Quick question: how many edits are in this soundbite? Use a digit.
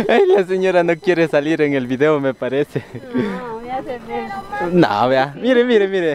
0